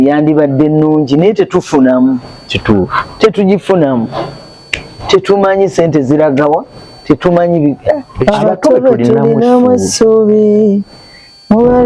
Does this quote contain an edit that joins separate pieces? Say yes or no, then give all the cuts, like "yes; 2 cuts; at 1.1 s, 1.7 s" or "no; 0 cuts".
yes; 1 cut; at 8.1 s